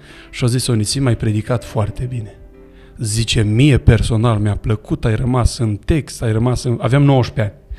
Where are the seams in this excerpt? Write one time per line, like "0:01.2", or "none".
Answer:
none